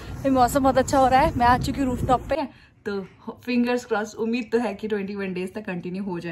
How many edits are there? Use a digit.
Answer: 1